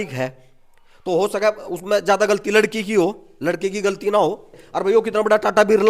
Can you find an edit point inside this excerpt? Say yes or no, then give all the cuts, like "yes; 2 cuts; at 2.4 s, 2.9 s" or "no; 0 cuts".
yes; 1 cut; at 4.7 s